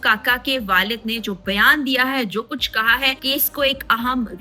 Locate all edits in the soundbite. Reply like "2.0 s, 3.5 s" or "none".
3.2 s